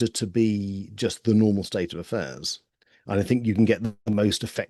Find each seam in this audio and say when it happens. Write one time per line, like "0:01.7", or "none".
none